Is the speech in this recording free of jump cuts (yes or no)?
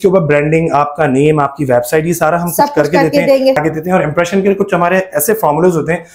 no